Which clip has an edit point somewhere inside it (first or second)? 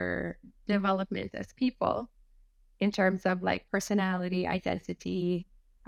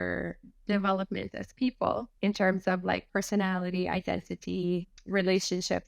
second